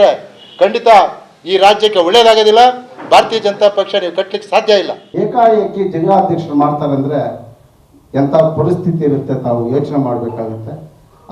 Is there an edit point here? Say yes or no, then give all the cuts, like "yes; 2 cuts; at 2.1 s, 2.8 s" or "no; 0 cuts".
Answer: yes; 1 cut; at 5.0 s